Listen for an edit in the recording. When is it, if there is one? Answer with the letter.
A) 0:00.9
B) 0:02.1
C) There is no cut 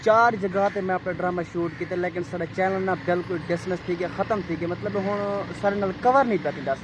C